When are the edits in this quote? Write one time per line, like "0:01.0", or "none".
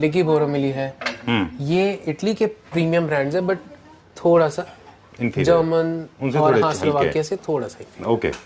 none